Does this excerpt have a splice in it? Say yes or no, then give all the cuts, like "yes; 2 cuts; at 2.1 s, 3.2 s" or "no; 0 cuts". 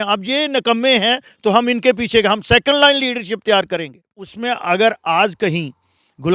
yes; 1 cut; at 4.4 s